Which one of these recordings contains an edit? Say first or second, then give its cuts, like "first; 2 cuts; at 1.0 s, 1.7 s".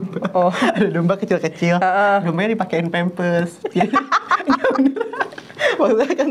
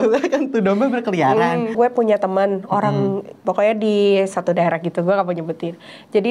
second; 1 cut; at 1.7 s